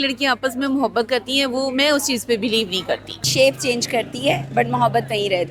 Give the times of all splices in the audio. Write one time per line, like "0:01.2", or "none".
0:03.3